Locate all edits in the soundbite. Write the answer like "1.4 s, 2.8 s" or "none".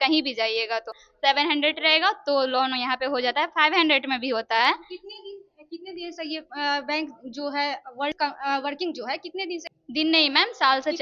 1.0 s, 8.2 s, 9.7 s